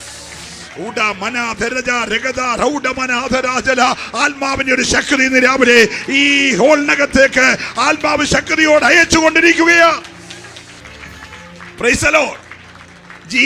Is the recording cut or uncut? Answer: cut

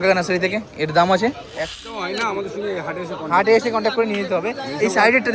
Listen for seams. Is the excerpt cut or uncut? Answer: cut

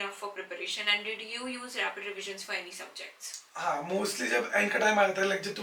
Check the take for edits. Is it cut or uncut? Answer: uncut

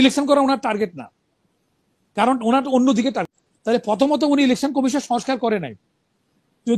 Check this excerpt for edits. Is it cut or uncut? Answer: cut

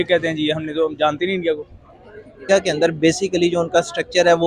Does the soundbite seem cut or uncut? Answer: cut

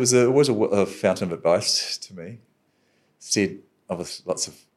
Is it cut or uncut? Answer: uncut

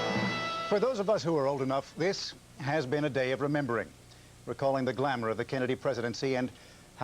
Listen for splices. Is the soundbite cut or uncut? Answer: cut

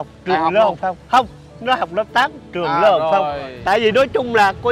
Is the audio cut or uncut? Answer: cut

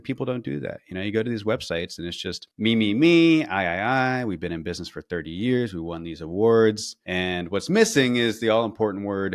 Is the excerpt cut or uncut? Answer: uncut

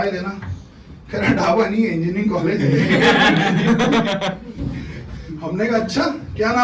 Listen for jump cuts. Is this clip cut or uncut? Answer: uncut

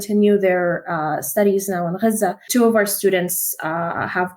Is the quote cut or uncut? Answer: cut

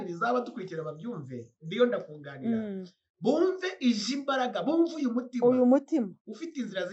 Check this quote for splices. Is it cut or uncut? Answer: uncut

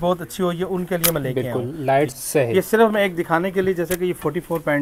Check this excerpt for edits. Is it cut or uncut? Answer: cut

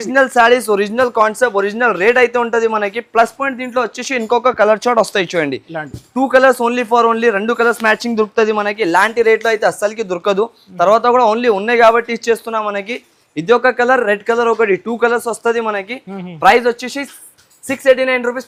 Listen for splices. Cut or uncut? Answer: uncut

